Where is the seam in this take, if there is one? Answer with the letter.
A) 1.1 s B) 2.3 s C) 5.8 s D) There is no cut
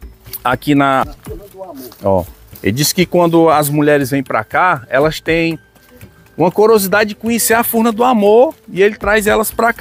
A